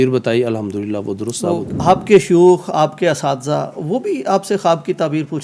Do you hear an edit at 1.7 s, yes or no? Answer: yes